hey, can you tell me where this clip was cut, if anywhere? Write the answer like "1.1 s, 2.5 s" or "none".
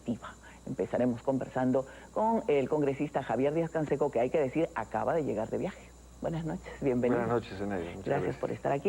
4.4 s